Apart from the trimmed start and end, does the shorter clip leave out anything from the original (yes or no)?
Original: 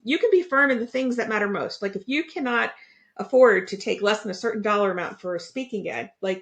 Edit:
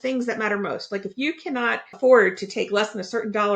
yes